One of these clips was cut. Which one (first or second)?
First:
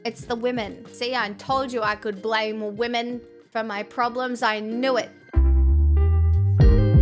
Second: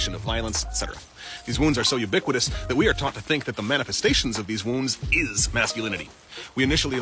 first